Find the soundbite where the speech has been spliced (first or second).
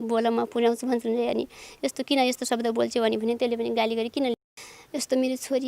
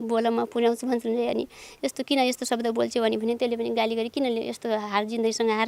first